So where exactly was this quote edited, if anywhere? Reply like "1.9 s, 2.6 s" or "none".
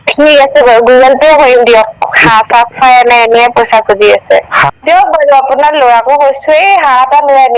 4.8 s